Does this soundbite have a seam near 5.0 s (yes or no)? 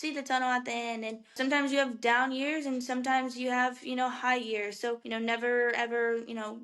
yes